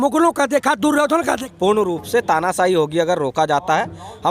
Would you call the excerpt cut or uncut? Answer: cut